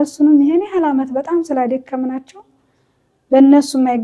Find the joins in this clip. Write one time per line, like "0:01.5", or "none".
none